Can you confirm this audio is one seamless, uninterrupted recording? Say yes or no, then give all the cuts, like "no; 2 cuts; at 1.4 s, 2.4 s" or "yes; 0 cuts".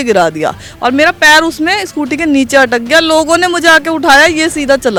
yes; 0 cuts